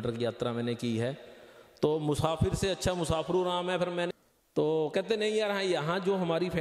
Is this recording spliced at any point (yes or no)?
yes